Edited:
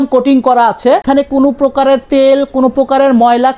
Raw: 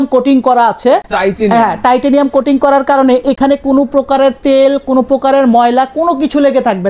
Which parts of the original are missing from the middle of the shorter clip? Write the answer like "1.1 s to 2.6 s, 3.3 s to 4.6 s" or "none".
1.0 s to 3.4 s